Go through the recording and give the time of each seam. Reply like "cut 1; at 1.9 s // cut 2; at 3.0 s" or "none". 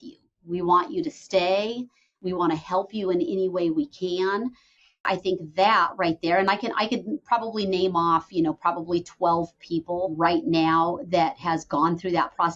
cut 1; at 2.2 s // cut 2; at 5.1 s // cut 3; at 10.1 s